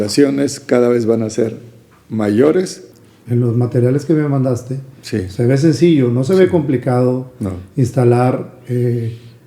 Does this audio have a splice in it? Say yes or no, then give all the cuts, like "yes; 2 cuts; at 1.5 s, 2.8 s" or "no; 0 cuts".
yes; 1 cut; at 2.9 s